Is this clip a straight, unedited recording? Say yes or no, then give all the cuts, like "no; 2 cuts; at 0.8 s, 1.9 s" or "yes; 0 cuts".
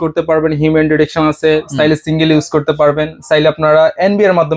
yes; 0 cuts